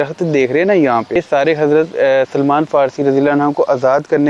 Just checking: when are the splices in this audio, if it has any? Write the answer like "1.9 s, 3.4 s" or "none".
1.2 s